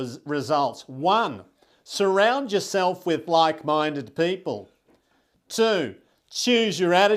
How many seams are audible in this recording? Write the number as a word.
zero